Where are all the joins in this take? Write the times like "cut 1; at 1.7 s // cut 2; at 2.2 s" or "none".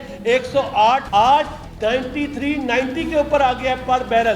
cut 1; at 1.1 s